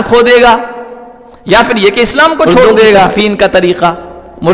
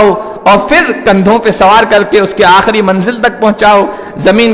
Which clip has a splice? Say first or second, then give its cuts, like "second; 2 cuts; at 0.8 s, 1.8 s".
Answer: first; 1 cut; at 3.1 s